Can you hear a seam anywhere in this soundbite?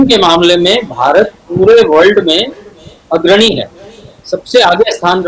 no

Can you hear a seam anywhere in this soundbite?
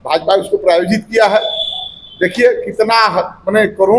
no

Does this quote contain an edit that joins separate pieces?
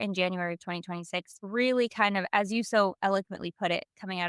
yes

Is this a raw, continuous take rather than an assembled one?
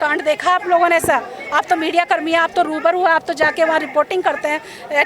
yes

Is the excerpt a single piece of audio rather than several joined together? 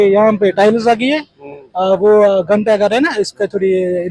yes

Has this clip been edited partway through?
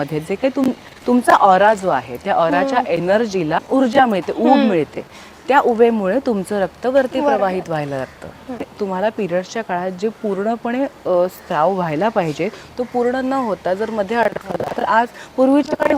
yes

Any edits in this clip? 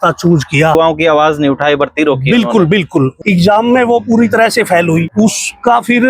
yes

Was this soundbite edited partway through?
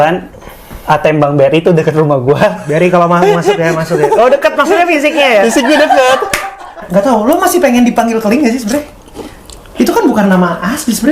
yes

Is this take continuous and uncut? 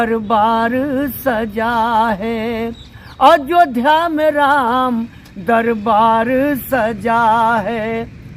yes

